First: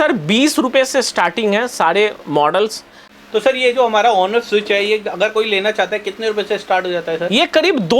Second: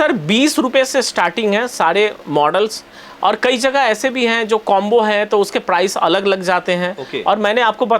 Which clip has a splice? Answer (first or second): first